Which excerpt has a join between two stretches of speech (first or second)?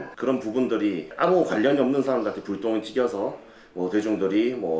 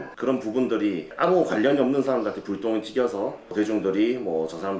second